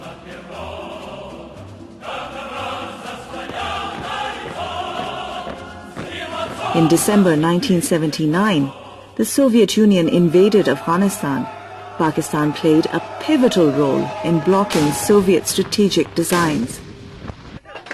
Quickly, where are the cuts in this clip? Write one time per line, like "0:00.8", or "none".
none